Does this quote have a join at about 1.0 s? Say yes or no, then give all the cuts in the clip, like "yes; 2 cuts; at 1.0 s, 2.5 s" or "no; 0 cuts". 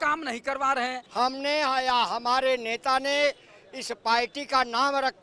yes; 1 cut; at 1.0 s